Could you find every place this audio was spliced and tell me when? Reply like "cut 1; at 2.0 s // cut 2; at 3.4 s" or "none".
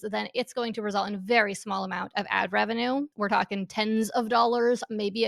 cut 1; at 3.1 s